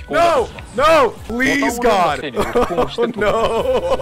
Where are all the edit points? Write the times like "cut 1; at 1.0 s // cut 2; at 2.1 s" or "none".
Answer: cut 1; at 1.2 s // cut 2; at 2.2 s